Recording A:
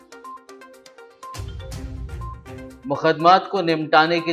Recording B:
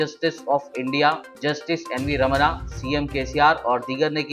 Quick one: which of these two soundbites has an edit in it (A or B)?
A